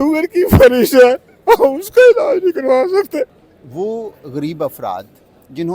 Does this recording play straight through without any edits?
no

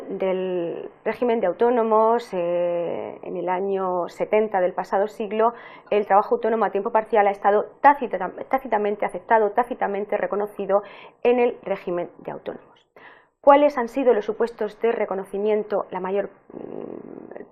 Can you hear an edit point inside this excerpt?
yes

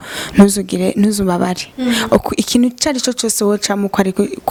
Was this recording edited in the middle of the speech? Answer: no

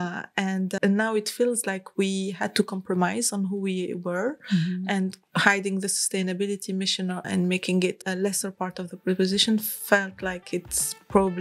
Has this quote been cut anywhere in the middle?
yes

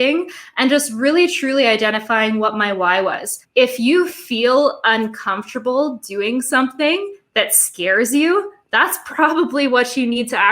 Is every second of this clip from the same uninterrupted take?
no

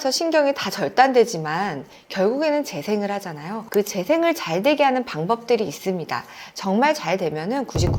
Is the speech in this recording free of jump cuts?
yes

